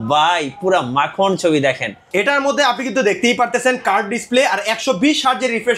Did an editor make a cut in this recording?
yes; 1 cut; at 2.0 s

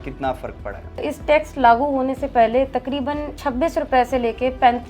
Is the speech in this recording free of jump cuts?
no; 2 cuts; at 1.0 s, 3.3 s

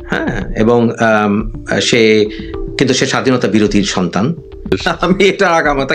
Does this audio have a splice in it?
yes; 1 cut; at 4.7 s

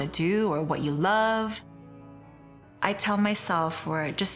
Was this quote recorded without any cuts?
no; 1 cut; at 2.1 s

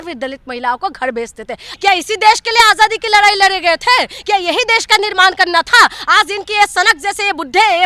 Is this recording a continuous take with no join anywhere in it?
no; 1 cut; at 1.6 s

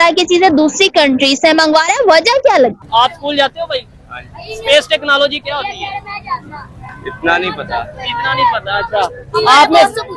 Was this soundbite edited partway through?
yes; 1 cut; at 2.8 s

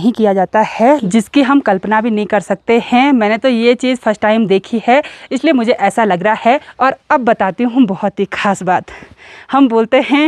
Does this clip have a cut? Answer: yes; 2 cuts; at 1.0 s, 6.7 s

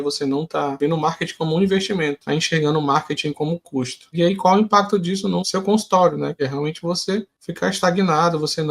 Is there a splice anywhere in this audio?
yes; 6 cuts; at 0.8 s, 2.2 s, 4.1 s, 5.4 s, 6.4 s, 7.4 s

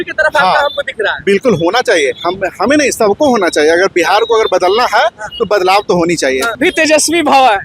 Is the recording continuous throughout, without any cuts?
no; 1 cut; at 6.5 s

